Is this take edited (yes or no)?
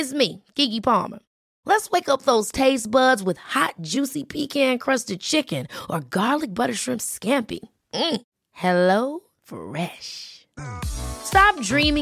no